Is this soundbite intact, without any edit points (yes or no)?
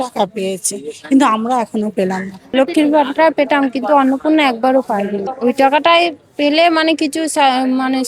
no